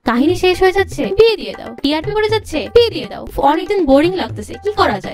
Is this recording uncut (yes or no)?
yes